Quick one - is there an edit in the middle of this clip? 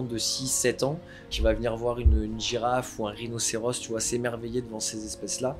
yes; 1 cut; at 1.3 s

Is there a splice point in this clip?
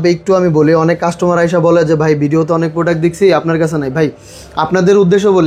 no; 0 cuts

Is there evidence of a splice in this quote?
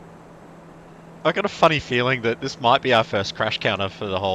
yes; 1 cut; at 1.2 s

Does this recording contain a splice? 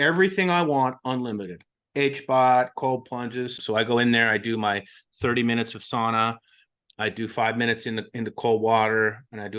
yes; 1 cut; at 3.5 s

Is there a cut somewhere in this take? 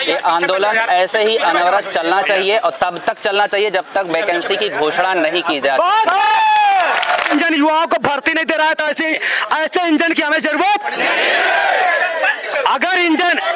yes; 1 cut; at 7.3 s

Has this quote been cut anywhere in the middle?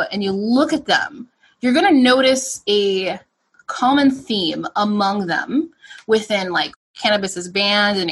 yes; 1 cut; at 6.8 s

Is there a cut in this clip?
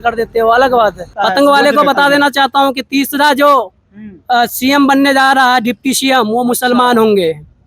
yes; 1 cut; at 1.1 s

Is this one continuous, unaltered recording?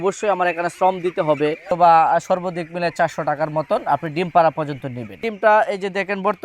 no; 2 cuts; at 1.7 s, 5.2 s

